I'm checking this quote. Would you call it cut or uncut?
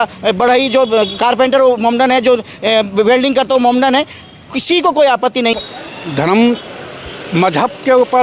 cut